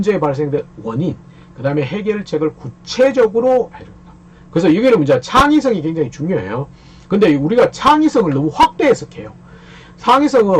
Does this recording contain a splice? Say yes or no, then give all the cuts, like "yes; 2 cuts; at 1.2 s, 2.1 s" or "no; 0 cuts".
no; 0 cuts